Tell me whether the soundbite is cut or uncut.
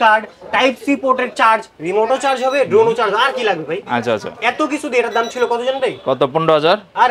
uncut